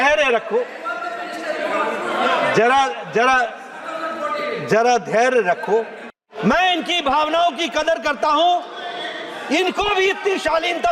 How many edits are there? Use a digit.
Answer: 1